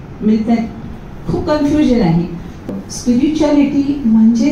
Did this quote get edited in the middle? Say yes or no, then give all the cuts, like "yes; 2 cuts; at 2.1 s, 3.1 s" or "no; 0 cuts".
yes; 1 cut; at 2.7 s